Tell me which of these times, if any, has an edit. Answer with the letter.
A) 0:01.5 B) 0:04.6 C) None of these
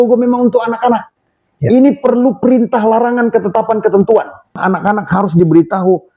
B